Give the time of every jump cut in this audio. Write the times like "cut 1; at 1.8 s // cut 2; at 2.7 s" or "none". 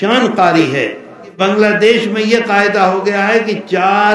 cut 1; at 1.4 s